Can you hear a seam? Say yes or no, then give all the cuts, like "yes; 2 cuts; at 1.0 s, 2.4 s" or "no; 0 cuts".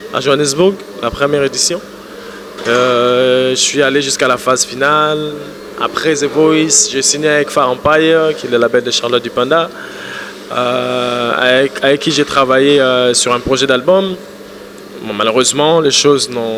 no; 0 cuts